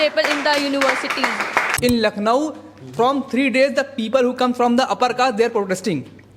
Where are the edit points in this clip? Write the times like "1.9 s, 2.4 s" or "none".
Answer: 1.7 s